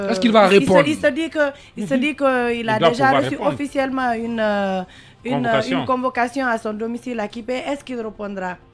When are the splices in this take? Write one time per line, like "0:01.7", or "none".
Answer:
none